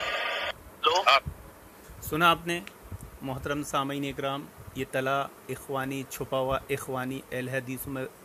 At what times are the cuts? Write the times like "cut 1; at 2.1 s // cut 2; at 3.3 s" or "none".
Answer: none